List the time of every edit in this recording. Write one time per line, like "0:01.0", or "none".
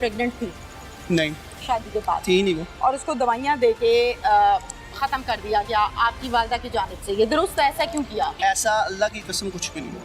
0:08.4